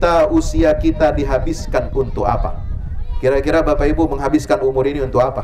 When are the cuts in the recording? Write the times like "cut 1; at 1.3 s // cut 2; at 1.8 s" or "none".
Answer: none